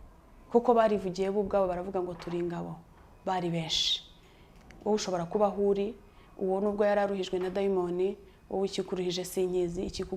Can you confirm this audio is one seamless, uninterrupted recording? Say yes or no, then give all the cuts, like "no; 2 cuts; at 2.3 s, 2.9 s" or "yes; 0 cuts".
yes; 0 cuts